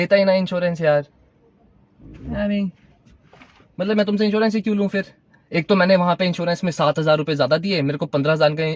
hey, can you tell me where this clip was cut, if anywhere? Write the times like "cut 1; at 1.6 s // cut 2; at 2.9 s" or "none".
none